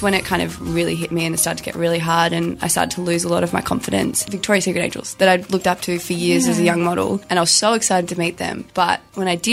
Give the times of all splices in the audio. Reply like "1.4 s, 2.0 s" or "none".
4.2 s, 7.2 s, 8.6 s